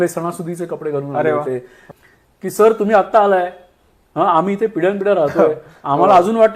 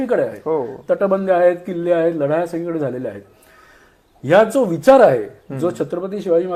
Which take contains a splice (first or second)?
first